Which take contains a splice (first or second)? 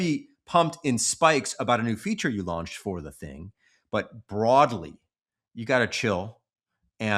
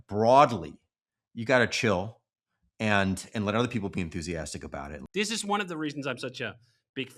second